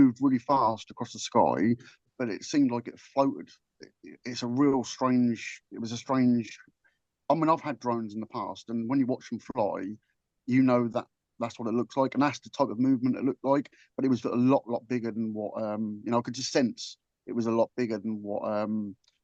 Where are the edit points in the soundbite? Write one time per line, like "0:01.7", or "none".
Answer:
0:02.0